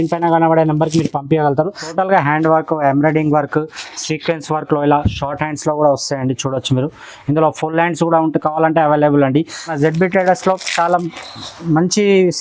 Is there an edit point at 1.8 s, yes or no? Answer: yes